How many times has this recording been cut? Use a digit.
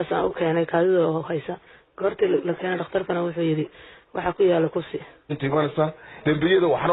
1